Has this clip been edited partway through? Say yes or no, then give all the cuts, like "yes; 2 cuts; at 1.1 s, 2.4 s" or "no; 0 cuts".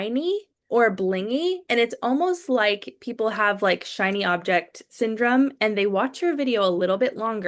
no; 0 cuts